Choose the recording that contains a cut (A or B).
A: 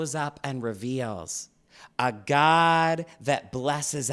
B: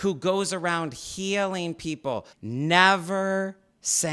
B